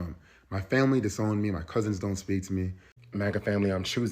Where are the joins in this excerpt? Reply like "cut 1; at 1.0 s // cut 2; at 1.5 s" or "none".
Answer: cut 1; at 2.9 s